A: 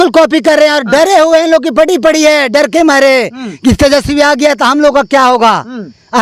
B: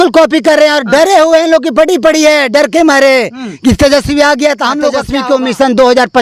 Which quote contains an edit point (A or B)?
B